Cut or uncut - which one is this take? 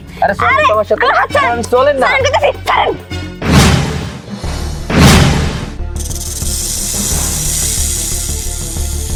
uncut